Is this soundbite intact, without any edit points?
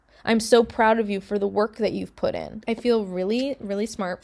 no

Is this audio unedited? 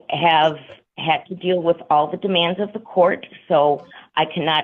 yes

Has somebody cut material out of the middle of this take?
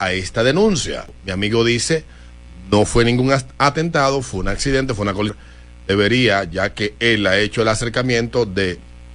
yes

